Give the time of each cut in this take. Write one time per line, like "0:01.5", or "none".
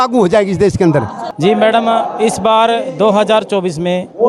0:01.2